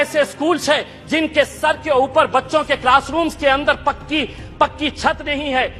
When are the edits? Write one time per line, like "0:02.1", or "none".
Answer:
none